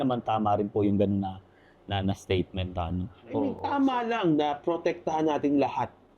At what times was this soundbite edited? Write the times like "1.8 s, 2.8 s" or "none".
3.5 s